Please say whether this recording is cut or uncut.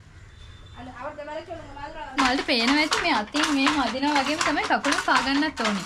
cut